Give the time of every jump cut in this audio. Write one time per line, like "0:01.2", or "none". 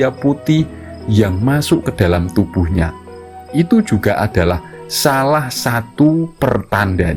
none